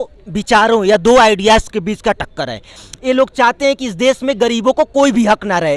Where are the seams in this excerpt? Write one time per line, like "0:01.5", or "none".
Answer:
0:02.7